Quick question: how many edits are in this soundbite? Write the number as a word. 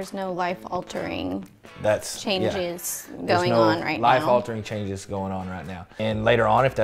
zero